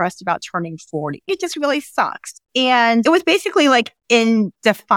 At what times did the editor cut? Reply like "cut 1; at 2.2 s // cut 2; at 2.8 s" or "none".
cut 1; at 3.0 s